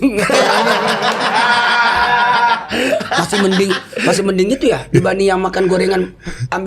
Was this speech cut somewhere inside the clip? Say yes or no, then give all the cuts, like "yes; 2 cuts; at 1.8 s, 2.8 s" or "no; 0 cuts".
no; 0 cuts